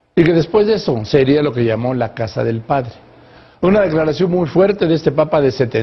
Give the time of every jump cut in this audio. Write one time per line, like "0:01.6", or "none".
0:02.1